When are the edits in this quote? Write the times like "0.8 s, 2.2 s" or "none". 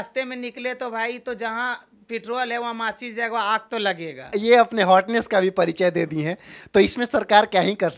none